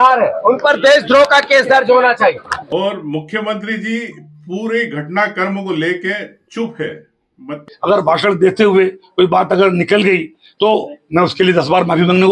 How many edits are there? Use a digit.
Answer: 2